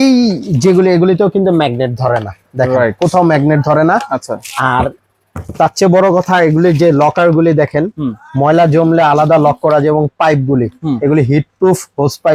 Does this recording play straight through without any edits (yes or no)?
yes